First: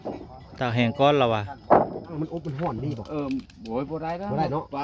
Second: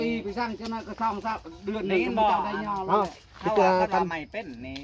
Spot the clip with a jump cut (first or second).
first